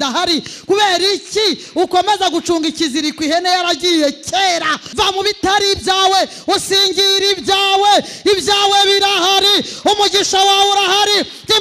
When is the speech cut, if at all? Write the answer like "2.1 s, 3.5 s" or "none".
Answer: 4.8 s